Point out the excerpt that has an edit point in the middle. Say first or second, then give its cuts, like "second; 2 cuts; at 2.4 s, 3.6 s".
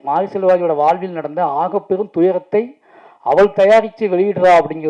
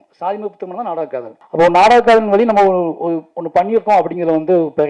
second; 1 cut; at 1.4 s